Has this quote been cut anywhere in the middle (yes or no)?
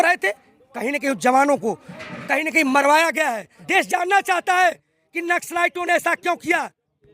yes